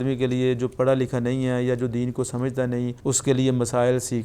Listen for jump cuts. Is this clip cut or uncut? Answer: cut